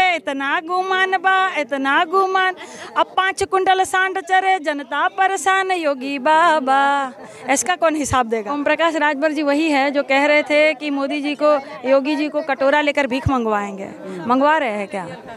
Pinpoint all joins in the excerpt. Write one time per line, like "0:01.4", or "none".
0:08.6

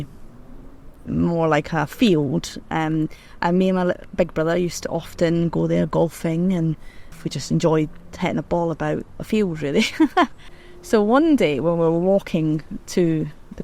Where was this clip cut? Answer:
0:07.2

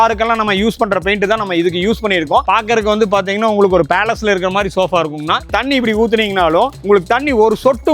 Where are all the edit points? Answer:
0:02.5
0:05.4

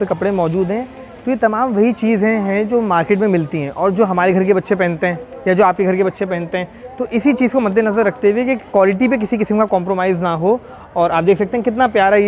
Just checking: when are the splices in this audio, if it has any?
none

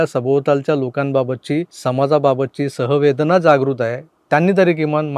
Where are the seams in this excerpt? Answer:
0:01.7

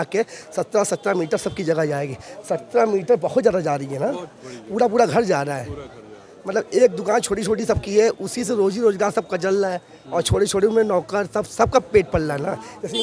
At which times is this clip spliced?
none

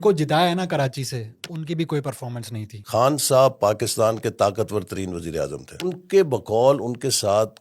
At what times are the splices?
0:02.8
0:06.0

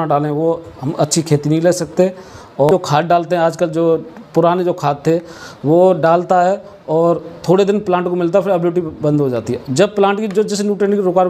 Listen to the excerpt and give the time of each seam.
0:02.7

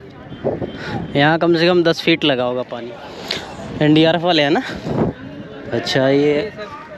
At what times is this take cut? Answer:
0:02.7

